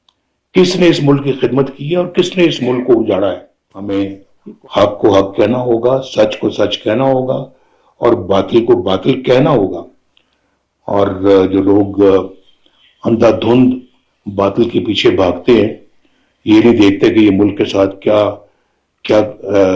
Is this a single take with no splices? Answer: no; 1 cut; at 3.7 s

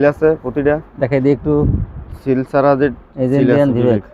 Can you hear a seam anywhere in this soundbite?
no; 0 cuts

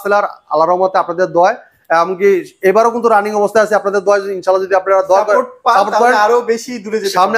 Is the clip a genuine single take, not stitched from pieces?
yes; 0 cuts

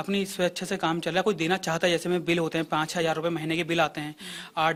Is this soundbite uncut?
yes; 0 cuts

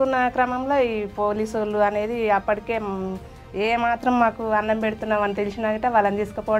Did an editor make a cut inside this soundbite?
no; 0 cuts

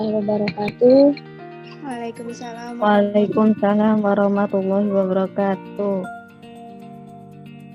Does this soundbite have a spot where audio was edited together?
yes; 1 cut; at 6.1 s

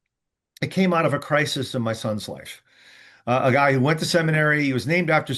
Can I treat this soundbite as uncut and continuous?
yes; 0 cuts

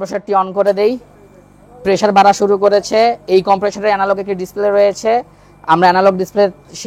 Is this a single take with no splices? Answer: yes; 0 cuts

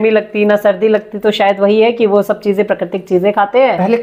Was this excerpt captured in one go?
yes; 0 cuts

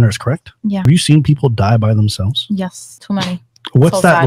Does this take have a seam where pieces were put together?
yes; 2 cuts; at 0.8 s, 2.9 s

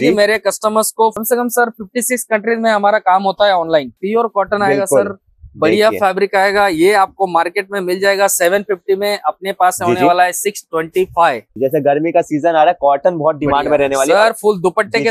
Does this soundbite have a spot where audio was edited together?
yes; 3 cuts; at 1.2 s, 4.0 s, 11.5 s

